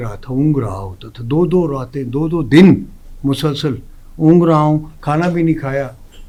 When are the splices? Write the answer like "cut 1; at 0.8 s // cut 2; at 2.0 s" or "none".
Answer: none

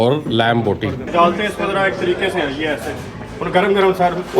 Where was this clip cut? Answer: cut 1; at 1.1 s

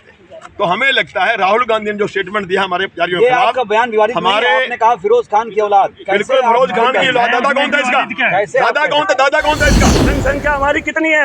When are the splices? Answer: cut 1; at 10.1 s

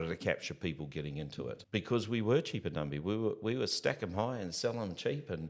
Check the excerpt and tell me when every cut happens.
cut 1; at 1.6 s

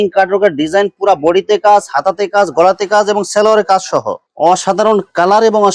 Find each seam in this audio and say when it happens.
cut 1; at 4.2 s

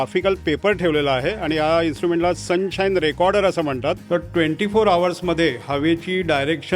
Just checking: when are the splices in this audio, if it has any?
cut 1; at 4.0 s

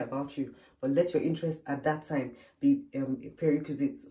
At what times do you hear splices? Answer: none

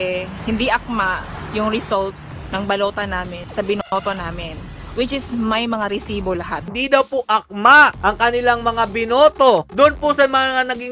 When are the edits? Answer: cut 1; at 6.6 s

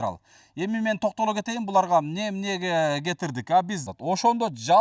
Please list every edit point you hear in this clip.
cut 1; at 3.8 s

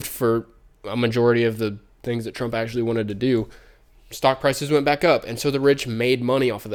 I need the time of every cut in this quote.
none

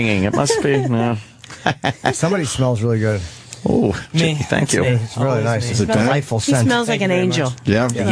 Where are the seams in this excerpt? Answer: none

